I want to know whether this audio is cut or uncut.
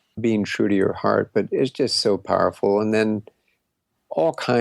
uncut